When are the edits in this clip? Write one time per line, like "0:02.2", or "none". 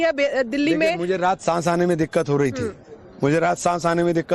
0:02.0